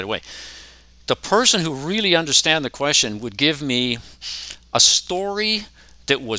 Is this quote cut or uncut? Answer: uncut